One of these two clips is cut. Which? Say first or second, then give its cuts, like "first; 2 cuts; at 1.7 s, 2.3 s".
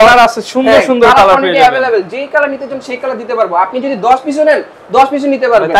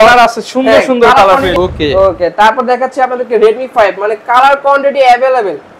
second; 1 cut; at 1.5 s